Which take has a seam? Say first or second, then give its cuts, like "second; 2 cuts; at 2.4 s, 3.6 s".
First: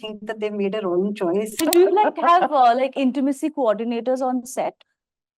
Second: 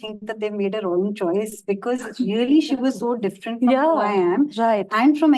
first; 1 cut; at 1.5 s